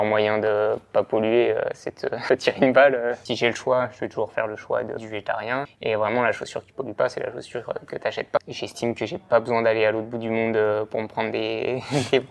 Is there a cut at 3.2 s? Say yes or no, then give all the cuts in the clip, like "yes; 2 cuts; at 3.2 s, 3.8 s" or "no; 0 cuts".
yes; 4 cuts; at 2.1 s, 3.2 s, 5.5 s, 8.4 s